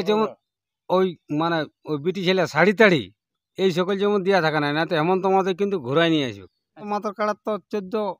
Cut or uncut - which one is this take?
cut